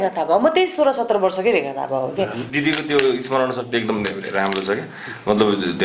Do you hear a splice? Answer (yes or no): yes